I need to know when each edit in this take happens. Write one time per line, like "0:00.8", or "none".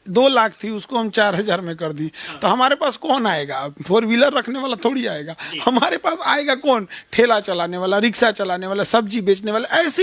none